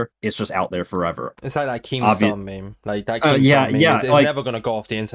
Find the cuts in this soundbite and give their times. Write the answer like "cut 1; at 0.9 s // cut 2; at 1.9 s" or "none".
cut 1; at 1.3 s